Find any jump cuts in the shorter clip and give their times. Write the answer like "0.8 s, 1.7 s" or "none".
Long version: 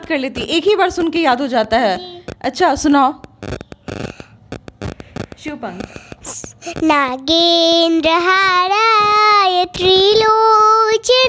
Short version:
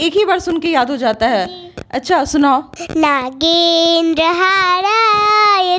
2.8 s